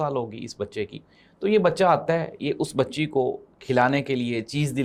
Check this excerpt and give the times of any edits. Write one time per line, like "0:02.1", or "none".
none